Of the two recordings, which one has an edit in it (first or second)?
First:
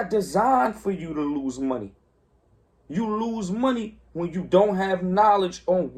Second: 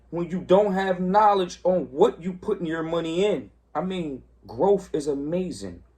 second